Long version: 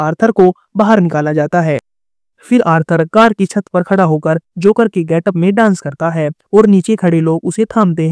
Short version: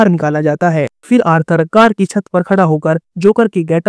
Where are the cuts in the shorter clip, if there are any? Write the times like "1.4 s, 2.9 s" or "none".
1.0 s

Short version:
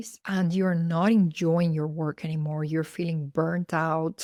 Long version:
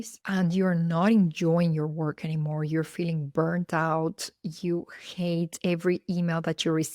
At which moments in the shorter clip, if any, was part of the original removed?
none

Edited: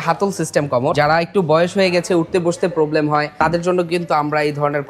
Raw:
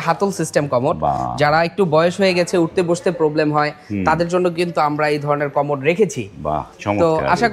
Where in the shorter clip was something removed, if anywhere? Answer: 0.9 s, 3.3 s

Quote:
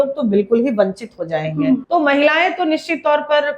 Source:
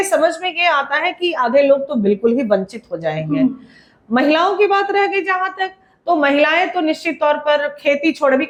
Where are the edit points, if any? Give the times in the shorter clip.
1.8 s

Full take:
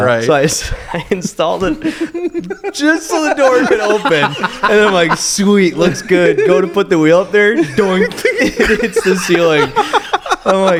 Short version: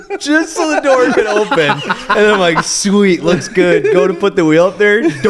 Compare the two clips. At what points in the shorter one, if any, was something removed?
none

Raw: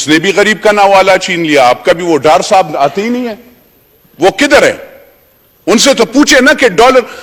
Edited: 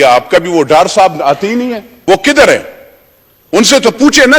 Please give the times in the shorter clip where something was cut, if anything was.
1.9 s

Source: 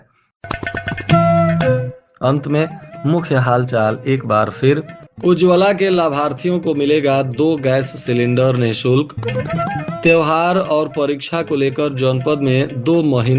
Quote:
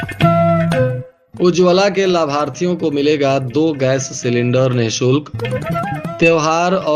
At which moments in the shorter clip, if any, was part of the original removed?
1.1 s

